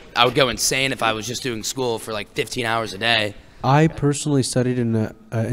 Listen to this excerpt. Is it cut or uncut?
cut